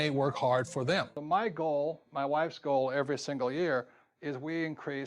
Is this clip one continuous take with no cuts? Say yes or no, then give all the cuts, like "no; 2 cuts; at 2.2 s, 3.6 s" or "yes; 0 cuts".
no; 1 cut; at 1.1 s